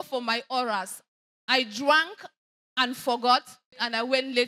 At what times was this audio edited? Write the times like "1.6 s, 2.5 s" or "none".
none